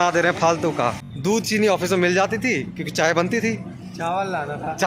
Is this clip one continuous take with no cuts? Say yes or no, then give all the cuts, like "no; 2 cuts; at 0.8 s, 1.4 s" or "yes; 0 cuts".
no; 1 cut; at 1.0 s